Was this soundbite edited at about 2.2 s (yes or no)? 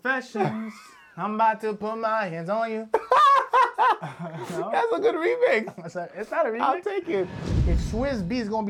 no